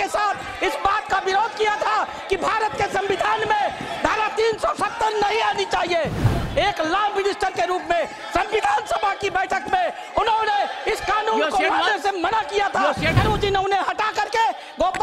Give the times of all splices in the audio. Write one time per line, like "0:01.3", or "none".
0:06.3
0:13.2

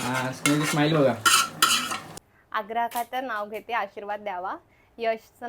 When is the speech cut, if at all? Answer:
0:02.1

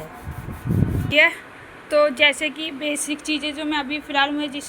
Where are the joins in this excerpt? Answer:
0:01.1

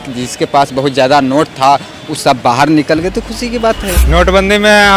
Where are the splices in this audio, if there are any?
0:03.9

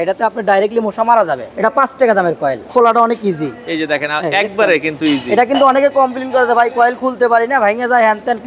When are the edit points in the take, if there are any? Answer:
0:01.4
0:02.6

